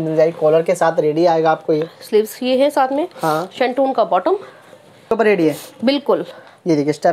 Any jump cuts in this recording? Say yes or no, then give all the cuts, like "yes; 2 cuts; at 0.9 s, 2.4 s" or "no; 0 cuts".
yes; 1 cut; at 5.1 s